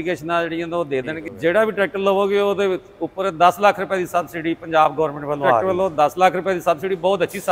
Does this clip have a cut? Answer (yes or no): yes